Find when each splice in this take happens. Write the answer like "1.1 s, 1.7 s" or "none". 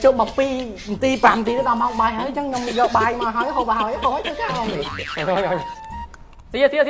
4.9 s